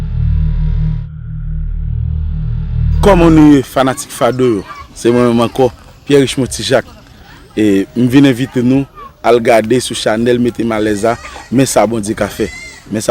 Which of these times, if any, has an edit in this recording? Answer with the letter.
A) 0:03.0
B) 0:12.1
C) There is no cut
A